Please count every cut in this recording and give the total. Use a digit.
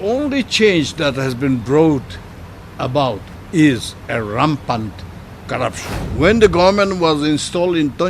2